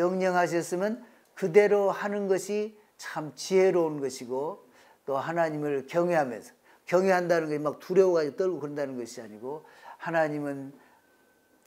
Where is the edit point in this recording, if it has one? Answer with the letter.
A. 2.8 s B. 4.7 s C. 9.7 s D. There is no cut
D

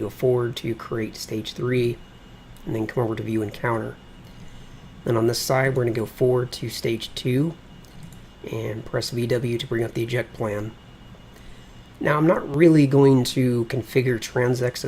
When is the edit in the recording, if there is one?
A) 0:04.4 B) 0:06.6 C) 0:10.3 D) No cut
B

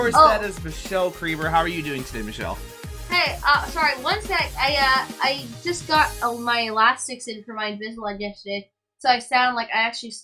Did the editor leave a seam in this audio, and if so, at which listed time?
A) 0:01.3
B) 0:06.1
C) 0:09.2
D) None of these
D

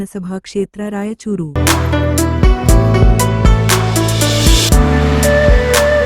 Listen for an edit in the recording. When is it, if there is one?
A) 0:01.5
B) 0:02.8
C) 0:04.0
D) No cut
D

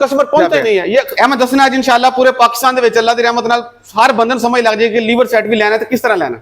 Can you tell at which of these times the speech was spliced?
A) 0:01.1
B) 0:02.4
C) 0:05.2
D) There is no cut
A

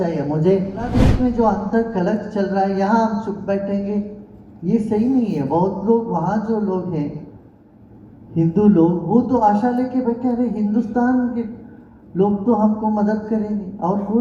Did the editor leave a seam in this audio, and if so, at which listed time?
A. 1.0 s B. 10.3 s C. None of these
A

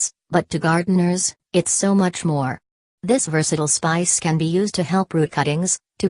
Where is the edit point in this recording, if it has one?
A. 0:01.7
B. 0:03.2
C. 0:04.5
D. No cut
C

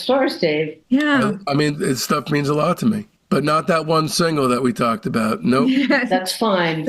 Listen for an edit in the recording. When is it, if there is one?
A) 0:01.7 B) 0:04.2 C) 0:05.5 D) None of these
A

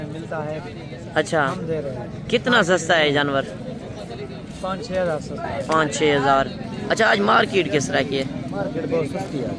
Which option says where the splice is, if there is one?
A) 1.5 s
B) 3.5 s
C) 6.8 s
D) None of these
C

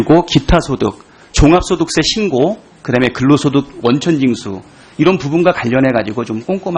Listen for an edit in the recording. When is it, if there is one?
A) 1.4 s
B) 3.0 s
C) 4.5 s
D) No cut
A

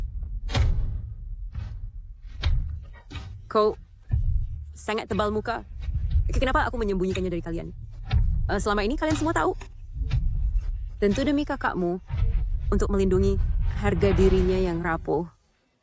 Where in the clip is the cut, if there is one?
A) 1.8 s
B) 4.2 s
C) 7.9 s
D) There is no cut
D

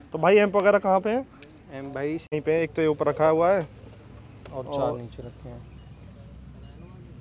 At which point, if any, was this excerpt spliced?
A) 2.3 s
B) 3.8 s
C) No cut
A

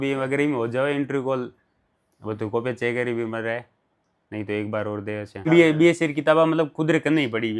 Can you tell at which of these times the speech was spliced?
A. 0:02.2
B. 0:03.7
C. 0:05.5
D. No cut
C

